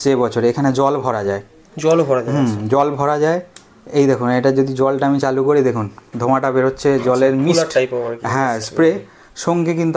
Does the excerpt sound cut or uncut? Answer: uncut